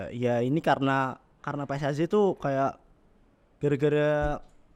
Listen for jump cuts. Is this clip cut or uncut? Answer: uncut